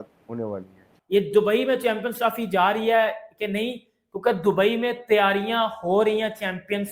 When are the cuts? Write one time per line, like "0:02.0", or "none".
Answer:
0:00.9